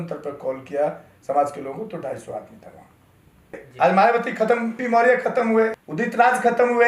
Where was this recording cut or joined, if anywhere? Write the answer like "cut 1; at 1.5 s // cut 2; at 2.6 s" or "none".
cut 1; at 3.6 s // cut 2; at 4.8 s // cut 3; at 5.8 s